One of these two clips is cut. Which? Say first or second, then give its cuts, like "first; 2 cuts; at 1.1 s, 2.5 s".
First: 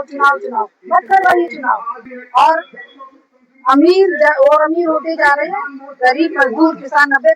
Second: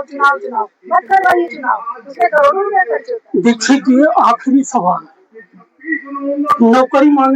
first; 1 cut; at 2.0 s